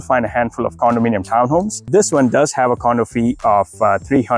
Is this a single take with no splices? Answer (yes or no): no